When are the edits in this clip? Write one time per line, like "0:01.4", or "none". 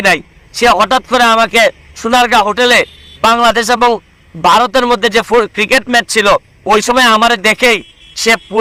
none

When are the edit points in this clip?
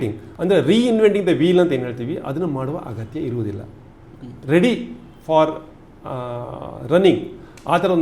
none

